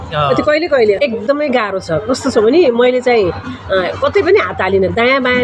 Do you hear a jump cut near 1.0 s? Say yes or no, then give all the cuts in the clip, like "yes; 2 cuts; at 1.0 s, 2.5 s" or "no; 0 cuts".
yes; 1 cut; at 1.0 s